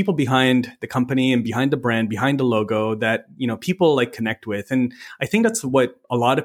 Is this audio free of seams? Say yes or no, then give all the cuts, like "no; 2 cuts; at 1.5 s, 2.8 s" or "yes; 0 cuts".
yes; 0 cuts